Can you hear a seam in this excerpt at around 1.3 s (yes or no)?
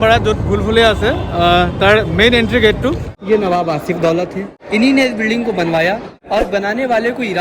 no